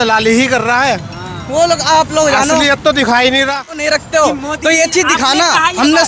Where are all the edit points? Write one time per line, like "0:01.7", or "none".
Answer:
0:03.8